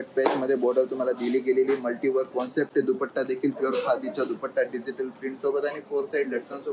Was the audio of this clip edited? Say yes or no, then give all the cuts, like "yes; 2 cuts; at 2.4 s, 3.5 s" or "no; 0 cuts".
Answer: no; 0 cuts